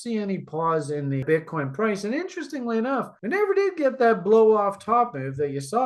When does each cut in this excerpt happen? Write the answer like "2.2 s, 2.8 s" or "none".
1.2 s